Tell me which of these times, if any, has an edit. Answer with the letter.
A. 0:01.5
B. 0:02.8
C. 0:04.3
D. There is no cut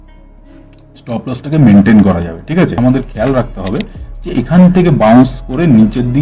B